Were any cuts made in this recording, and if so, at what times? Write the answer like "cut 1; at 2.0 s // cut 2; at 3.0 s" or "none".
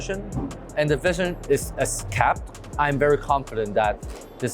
cut 1; at 1.4 s